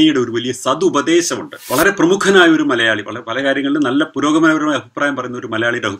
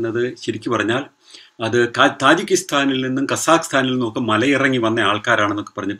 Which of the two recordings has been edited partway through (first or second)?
first